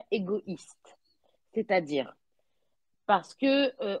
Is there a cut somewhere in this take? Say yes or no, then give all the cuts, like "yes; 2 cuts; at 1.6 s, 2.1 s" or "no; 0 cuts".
no; 0 cuts